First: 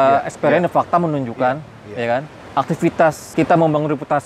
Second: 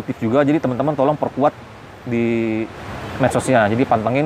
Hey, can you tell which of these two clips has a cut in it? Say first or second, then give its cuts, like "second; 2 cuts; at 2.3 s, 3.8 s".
first; 1 cut; at 3.2 s